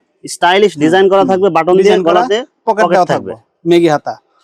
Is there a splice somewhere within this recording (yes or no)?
no